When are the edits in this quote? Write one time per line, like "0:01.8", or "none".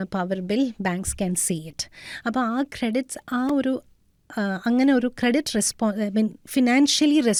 none